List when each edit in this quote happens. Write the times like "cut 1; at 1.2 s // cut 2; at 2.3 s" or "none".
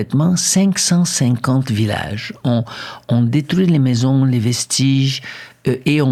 none